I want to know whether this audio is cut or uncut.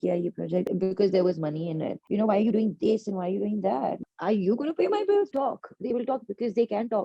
cut